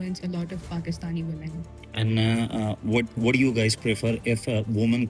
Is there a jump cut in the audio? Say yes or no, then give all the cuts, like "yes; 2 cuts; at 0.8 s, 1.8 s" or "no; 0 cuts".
no; 0 cuts